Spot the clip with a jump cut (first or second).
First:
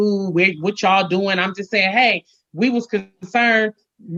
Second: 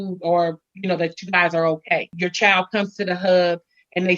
second